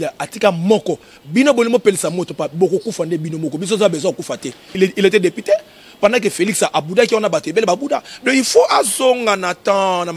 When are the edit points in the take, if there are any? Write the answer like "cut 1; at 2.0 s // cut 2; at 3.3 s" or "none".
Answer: cut 1; at 4.8 s

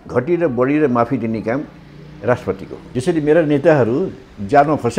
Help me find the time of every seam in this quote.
cut 1; at 2.9 s

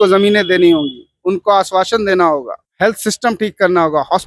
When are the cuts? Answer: cut 1; at 2.6 s

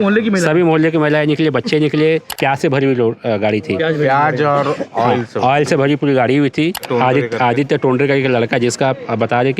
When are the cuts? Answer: cut 1; at 2.4 s // cut 2; at 6.8 s

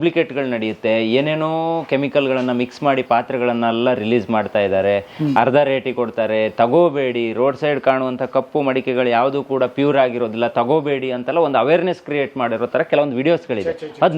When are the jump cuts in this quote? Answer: none

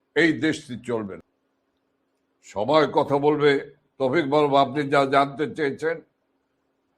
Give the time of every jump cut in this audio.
cut 1; at 1.2 s

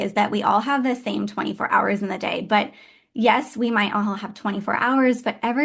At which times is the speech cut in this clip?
none

